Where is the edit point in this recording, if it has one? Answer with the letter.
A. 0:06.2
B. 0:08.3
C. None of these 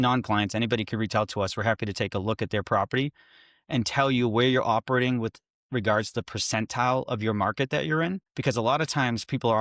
B